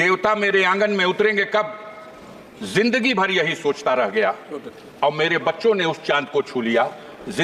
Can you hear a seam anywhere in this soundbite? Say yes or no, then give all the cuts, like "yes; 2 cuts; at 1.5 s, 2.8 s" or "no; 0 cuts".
no; 0 cuts